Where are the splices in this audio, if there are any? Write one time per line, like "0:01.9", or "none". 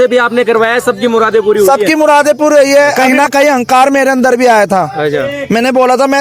0:03.0

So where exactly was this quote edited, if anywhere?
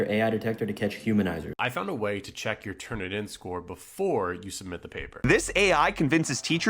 0:01.5
0:05.2

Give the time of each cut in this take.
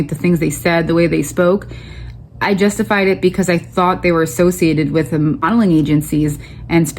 0:05.5

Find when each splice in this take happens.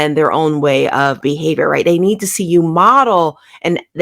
0:01.2

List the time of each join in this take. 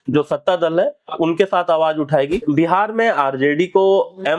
0:02.4

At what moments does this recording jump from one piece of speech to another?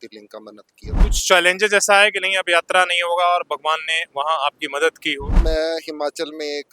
0:00.9
0:05.3

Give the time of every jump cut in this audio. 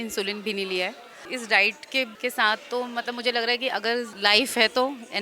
0:01.3
0:02.1
0:04.1

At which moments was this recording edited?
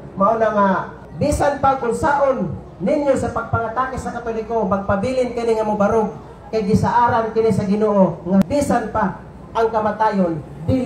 0:01.0
0:08.4

